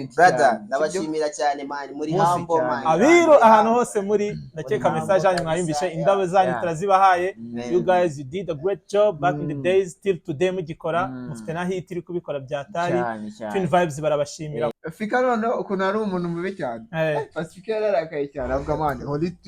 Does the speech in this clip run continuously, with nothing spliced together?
no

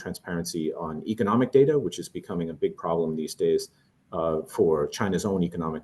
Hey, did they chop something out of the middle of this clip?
no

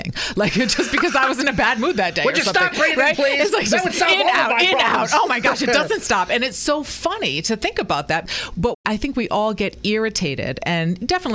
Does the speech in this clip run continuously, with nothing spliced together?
yes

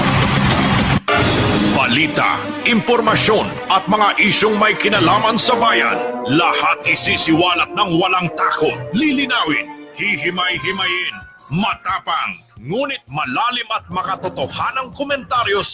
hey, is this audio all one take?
no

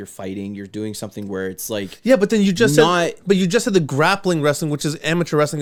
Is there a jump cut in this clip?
no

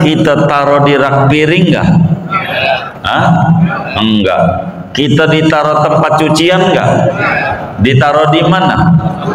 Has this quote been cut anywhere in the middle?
no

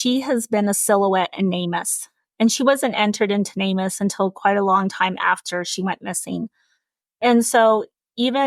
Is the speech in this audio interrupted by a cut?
yes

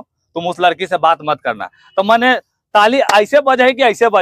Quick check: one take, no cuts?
yes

